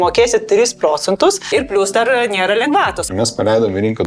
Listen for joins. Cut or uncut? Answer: cut